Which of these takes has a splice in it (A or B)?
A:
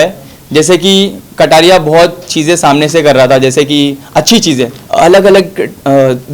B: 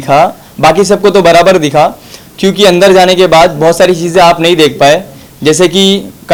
A